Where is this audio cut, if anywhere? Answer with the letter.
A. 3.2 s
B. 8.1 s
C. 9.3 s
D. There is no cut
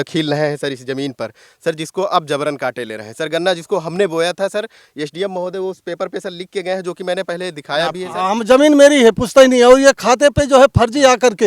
B